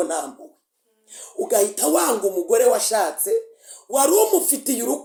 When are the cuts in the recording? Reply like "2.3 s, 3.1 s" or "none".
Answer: none